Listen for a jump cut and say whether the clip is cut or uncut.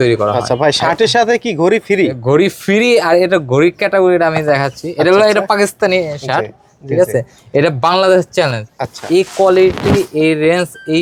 uncut